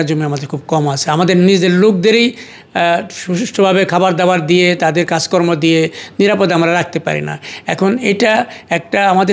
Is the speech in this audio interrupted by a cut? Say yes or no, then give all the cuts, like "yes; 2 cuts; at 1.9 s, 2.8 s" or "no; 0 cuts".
no; 0 cuts